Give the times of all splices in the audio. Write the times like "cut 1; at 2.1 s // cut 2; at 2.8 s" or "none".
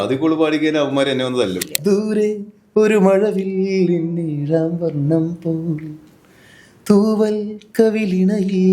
cut 1; at 1.7 s